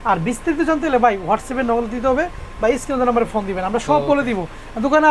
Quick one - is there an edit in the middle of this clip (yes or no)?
no